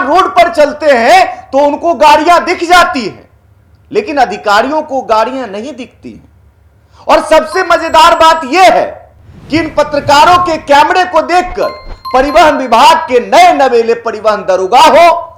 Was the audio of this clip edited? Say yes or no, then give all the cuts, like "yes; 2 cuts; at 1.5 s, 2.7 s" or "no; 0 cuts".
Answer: no; 0 cuts